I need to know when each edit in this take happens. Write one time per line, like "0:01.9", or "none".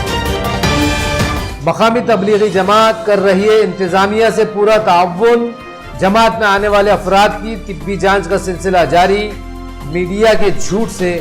0:01.4